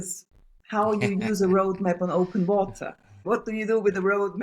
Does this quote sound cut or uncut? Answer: cut